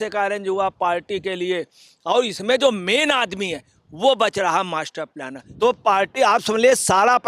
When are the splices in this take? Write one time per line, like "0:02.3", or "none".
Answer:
0:05.4